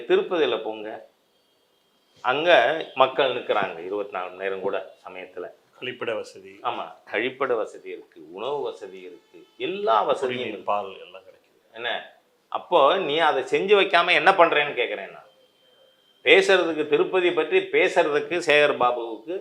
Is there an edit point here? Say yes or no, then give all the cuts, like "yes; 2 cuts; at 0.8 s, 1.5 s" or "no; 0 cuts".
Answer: no; 0 cuts